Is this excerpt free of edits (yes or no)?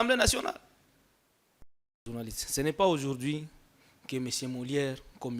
no